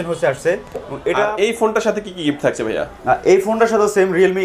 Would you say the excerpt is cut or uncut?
cut